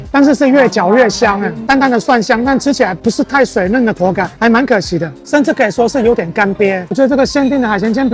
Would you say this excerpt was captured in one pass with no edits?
no; 2 cuts; at 1.5 s, 6.9 s

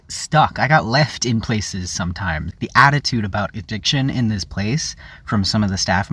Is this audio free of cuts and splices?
no; 1 cut; at 2.5 s

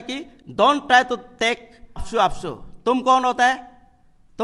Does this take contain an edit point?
yes; 1 cut; at 2.1 s

